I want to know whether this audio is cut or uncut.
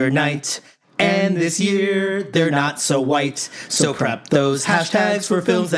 uncut